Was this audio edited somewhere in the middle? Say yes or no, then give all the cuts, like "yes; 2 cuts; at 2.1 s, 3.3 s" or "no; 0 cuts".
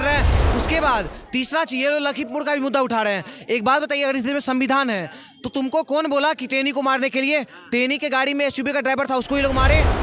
no; 0 cuts